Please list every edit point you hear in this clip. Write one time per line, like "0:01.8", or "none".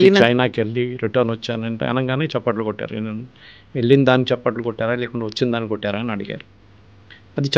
none